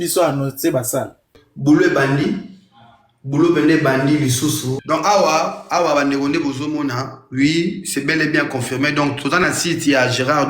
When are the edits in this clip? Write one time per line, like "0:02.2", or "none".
0:01.3
0:04.7